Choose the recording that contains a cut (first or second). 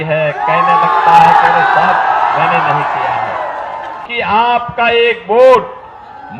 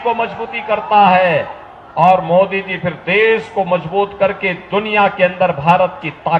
first